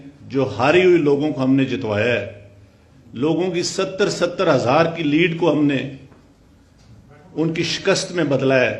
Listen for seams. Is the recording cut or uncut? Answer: uncut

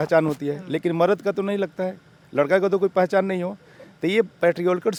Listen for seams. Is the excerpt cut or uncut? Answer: uncut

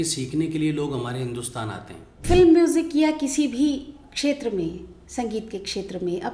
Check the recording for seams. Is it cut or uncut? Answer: cut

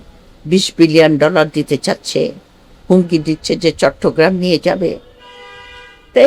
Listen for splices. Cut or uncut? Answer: uncut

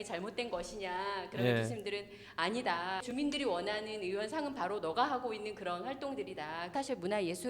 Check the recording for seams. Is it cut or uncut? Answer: cut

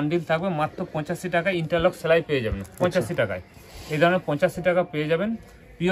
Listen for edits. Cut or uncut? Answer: uncut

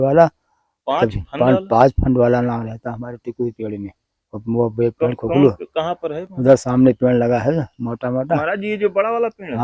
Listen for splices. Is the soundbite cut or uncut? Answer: uncut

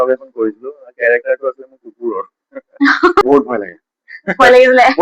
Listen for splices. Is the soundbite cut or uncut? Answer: cut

